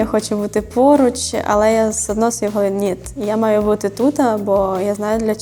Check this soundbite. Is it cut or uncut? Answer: uncut